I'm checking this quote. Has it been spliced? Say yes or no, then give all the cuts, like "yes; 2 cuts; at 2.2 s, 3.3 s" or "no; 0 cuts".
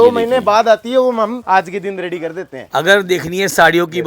yes; 2 cuts; at 1.4 s, 2.7 s